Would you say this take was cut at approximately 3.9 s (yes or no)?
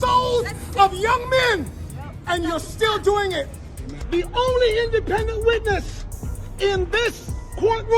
yes